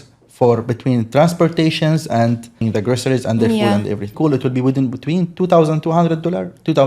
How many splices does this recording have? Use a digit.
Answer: 2